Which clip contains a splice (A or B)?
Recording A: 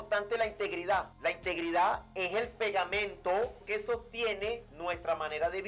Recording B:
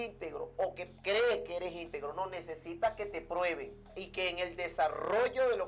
A